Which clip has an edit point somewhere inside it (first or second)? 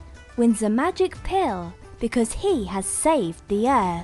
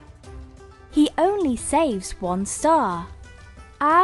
second